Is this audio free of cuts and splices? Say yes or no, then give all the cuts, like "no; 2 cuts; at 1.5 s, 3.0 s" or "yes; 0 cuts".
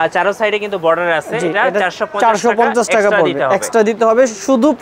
yes; 0 cuts